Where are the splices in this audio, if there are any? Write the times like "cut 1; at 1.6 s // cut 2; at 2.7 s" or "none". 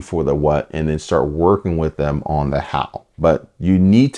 cut 1; at 3.0 s